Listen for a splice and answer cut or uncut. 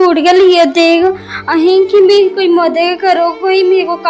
uncut